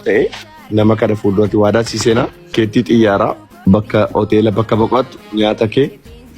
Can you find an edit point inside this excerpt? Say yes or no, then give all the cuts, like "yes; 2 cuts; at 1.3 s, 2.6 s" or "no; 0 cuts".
yes; 2 cuts; at 2.5 s, 3.5 s